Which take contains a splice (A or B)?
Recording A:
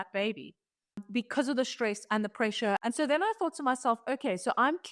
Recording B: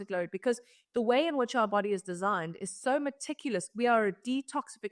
A